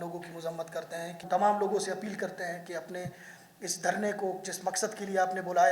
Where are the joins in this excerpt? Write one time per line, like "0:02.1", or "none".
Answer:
0:01.2